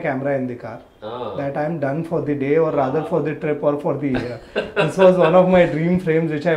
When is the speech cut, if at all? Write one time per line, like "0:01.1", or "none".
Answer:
none